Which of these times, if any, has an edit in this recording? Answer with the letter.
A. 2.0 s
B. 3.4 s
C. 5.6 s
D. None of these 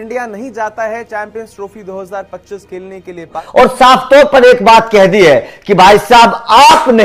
B